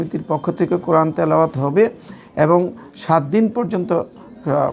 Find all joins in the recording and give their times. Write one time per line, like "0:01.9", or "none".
none